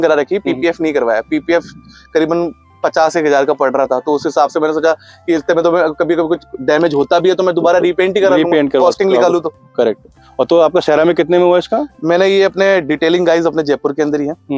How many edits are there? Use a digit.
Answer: 0